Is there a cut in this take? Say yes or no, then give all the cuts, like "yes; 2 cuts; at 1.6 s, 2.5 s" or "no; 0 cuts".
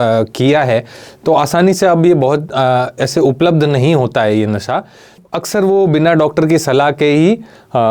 yes; 1 cut; at 5.2 s